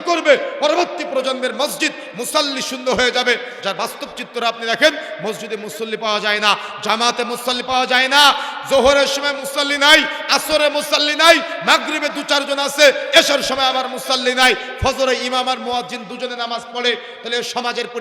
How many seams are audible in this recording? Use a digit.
0